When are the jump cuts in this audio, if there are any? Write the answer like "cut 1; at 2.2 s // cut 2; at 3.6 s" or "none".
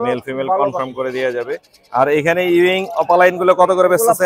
none